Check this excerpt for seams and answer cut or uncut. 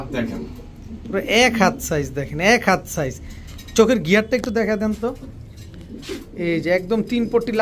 uncut